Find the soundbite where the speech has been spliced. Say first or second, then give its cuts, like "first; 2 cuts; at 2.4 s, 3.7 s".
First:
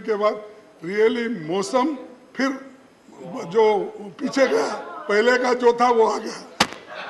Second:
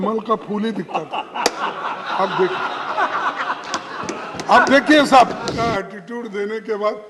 second; 1 cut; at 5.4 s